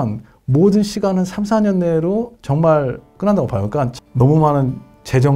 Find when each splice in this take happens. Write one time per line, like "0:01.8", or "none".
0:03.1
0:04.0

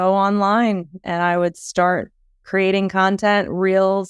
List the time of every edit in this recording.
0:02.4

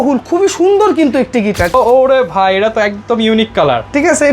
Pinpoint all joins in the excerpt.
0:01.7

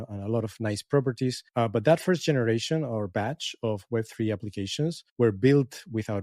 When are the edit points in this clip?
0:01.5
0:05.0

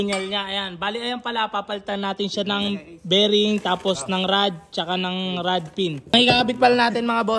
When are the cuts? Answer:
0:06.1

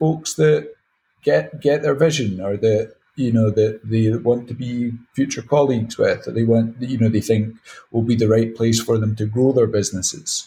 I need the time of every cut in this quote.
none

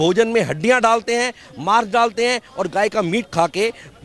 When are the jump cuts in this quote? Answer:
none

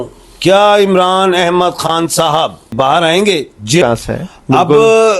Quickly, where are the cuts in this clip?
0:02.7
0:03.8

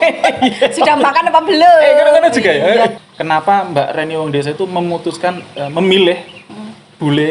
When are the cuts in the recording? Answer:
0:02.9

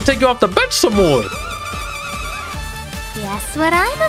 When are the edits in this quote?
none

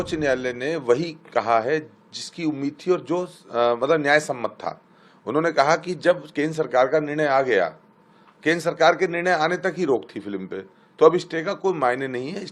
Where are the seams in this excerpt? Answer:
none

